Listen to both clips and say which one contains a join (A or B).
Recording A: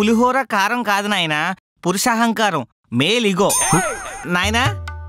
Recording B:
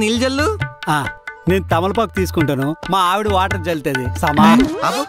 A